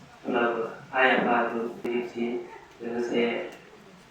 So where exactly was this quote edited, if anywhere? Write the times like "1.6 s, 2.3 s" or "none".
1.9 s